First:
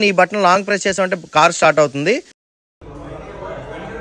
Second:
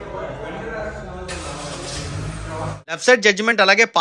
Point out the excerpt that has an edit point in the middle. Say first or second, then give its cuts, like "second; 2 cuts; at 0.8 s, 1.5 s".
second; 1 cut; at 3.0 s